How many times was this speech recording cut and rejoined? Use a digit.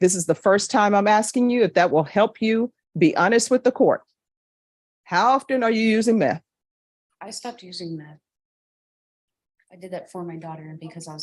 0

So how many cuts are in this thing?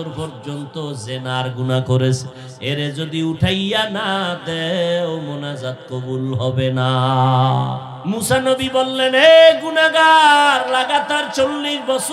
1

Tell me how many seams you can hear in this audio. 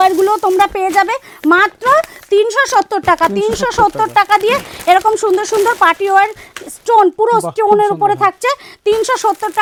0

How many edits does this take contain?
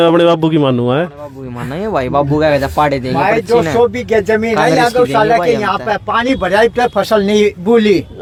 0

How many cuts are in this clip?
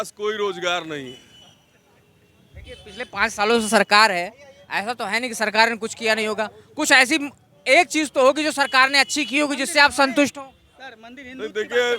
0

